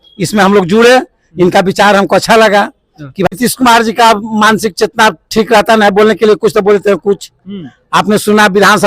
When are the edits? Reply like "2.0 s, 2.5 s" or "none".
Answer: 3.3 s